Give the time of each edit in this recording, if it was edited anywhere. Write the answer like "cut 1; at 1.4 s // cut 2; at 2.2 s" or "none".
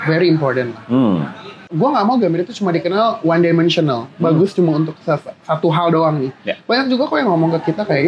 cut 1; at 2.1 s